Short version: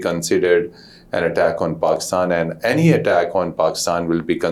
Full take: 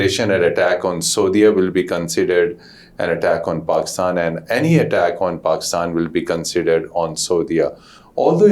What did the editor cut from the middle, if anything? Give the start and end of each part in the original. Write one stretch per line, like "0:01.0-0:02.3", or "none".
none